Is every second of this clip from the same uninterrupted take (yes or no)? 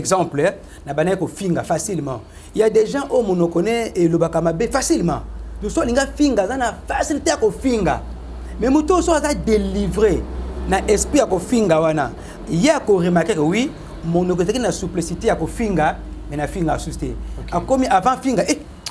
yes